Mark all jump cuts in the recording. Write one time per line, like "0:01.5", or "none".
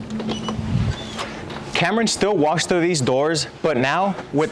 none

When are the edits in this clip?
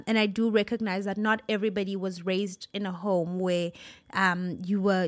none

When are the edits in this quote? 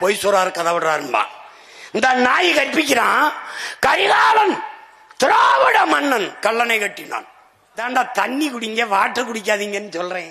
0:07.8

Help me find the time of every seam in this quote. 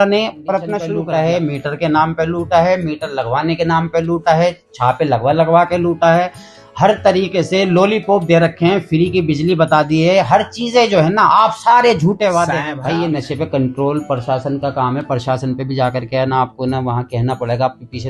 0:00.8
0:12.7

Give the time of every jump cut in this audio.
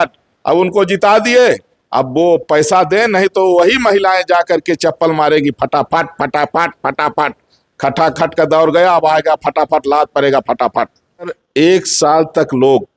0:11.3

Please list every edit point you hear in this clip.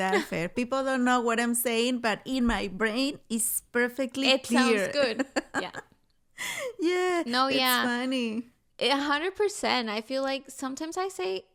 none

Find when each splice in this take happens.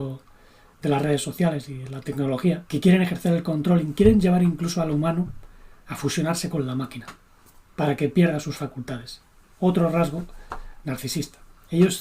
0:02.6

